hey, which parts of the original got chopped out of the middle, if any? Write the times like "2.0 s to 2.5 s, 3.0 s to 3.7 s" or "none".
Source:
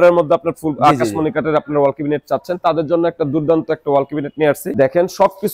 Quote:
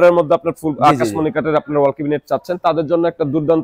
none

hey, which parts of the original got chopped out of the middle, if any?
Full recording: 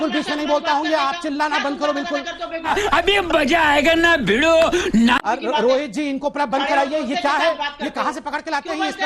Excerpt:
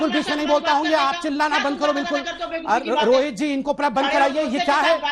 2.7 s to 5.2 s

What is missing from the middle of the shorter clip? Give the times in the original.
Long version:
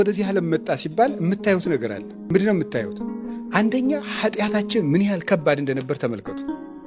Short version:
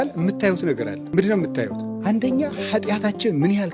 2.0 s to 2.1 s, 3.0 s to 3.3 s

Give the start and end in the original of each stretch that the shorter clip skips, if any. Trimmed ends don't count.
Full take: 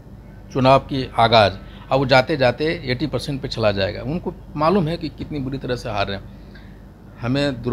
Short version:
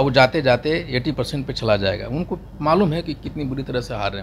none

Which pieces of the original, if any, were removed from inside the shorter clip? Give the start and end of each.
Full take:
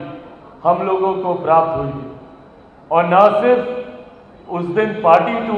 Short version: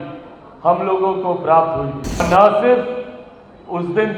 2.2 s to 3.0 s

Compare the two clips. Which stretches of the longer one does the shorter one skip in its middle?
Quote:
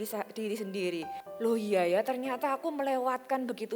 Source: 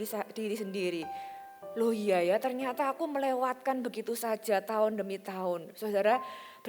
1.2 s to 1.6 s

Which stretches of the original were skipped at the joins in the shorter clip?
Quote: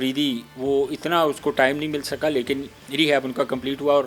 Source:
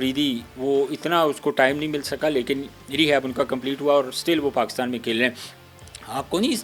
none

